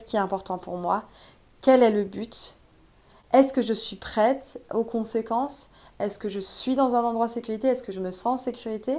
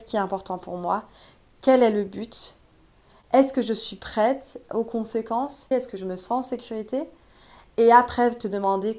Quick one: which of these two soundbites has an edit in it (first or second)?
second